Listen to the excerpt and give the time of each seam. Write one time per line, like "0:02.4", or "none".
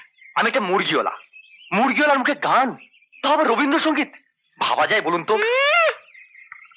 none